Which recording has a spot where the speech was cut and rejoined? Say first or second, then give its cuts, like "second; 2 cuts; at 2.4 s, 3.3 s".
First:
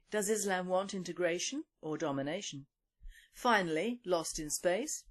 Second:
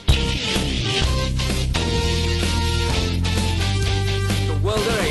first; 1 cut; at 2.2 s